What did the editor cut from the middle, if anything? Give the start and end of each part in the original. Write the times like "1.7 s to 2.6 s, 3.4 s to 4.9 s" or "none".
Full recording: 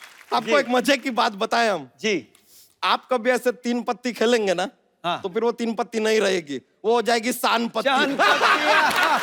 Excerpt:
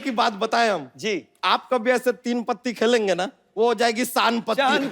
1.9 s to 2.3 s, 4.8 s to 6.7 s